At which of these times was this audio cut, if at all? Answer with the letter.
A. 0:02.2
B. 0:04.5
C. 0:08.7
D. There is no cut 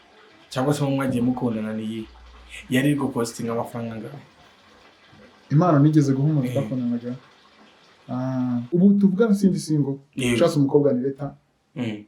C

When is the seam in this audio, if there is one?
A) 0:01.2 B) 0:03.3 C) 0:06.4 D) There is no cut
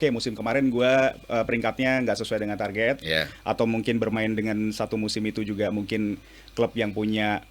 D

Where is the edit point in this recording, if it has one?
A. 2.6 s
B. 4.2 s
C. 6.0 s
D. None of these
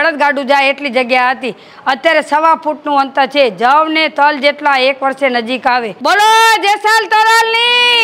C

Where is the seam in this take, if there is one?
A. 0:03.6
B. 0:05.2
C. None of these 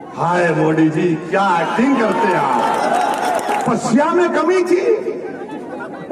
A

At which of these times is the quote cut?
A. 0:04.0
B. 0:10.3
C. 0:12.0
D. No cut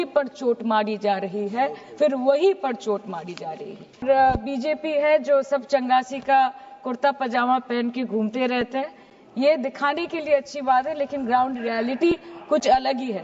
A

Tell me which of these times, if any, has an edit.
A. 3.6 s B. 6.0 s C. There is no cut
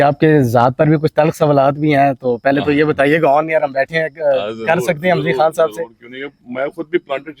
C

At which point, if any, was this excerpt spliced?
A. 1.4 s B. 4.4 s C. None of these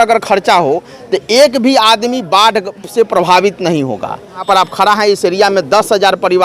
B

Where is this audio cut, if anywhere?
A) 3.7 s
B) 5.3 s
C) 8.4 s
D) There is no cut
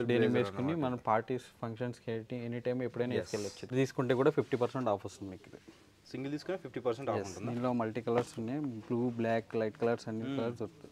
A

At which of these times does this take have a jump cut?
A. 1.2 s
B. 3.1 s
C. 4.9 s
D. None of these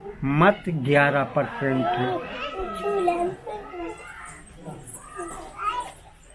D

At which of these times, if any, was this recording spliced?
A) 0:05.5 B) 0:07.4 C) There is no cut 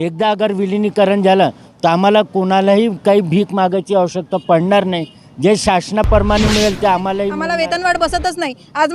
B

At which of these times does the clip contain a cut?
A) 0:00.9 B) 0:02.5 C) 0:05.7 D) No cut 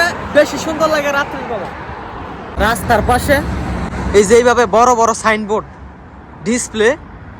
B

